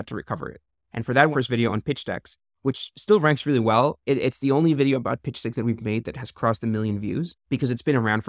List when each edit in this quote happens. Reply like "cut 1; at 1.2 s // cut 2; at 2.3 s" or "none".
cut 1; at 1.3 s // cut 2; at 4.0 s // cut 3; at 7.4 s